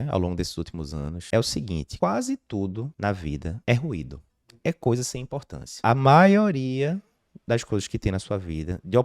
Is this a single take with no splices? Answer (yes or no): no